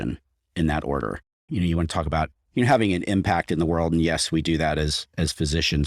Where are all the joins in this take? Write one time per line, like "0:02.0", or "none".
0:01.3